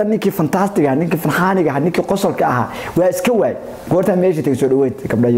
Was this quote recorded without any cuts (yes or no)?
yes